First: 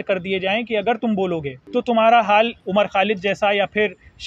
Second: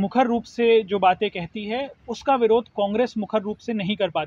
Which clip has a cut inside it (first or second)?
first